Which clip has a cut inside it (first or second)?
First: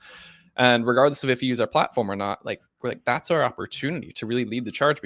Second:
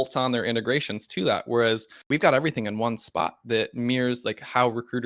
second